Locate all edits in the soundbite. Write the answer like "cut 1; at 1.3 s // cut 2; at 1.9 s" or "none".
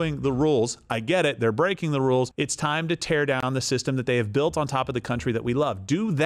cut 1; at 2.3 s